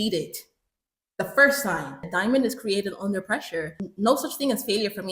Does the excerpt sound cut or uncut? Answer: cut